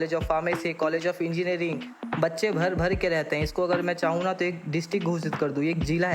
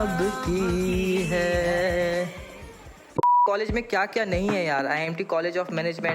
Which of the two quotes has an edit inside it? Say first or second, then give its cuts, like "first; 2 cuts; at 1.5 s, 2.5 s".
second; 1 cut; at 3.1 s